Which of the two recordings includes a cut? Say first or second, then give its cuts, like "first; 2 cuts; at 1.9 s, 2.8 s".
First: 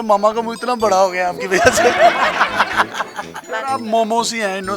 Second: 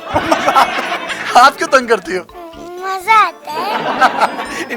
first; 1 cut; at 3.3 s